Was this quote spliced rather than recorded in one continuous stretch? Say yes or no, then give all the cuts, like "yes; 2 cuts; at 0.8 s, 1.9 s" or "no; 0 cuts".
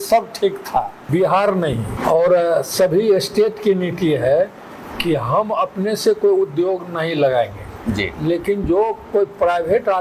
yes; 2 cuts; at 1.0 s, 1.9 s